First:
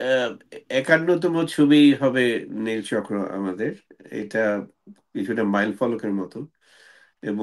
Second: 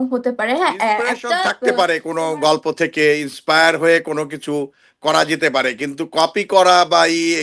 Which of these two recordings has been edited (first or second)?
second